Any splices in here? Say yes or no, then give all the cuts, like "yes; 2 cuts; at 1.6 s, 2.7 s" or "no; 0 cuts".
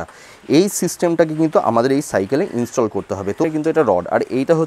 yes; 1 cut; at 3.4 s